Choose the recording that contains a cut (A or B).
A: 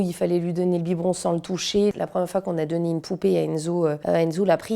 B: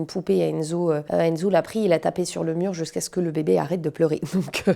A